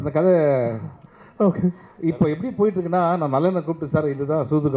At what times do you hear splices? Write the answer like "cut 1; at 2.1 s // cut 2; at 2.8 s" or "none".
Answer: none